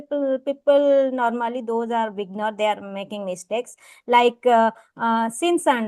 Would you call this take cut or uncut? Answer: uncut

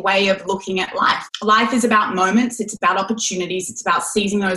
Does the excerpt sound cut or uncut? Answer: uncut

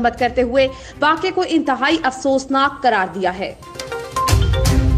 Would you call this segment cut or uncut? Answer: cut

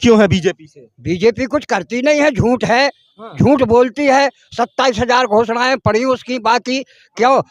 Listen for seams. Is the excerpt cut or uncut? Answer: uncut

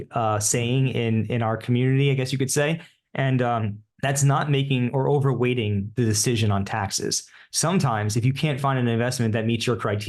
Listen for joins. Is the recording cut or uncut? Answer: cut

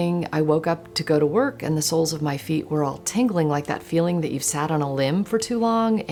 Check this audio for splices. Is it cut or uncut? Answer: uncut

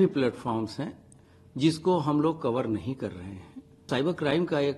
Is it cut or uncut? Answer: cut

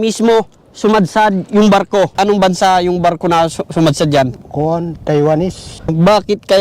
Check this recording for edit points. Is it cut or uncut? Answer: cut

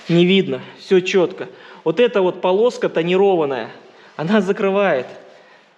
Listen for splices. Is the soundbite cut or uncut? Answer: uncut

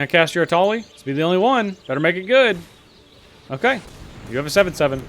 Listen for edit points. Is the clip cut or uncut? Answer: cut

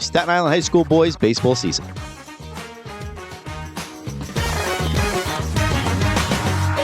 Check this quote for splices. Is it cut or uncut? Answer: cut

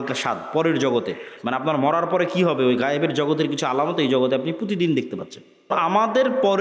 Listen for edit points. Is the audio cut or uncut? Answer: cut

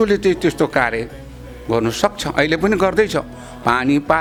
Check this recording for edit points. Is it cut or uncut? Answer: uncut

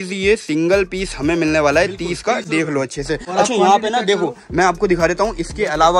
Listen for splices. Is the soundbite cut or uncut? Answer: uncut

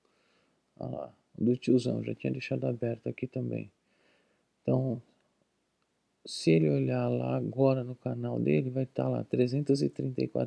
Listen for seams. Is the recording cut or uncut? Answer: uncut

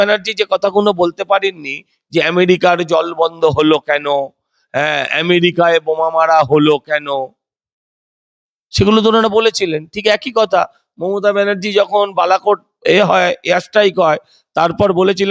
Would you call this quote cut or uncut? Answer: uncut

